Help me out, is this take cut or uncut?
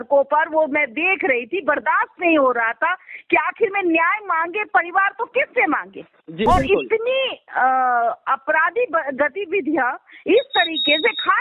cut